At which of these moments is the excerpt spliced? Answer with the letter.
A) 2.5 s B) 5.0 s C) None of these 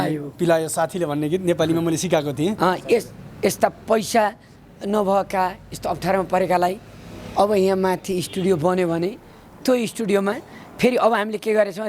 A